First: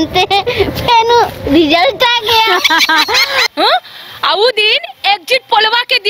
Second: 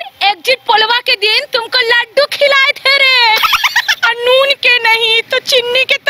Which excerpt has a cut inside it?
first; 1 cut; at 3.5 s

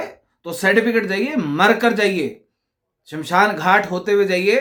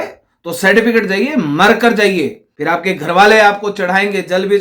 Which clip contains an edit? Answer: second; 1 cut; at 2.5 s

